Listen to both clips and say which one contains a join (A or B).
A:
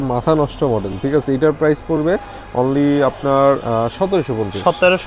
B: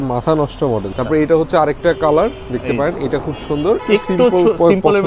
B